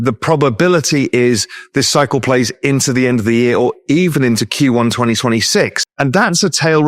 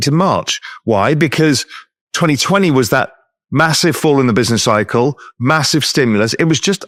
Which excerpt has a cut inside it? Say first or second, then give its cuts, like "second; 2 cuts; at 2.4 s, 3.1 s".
first; 1 cut; at 5.8 s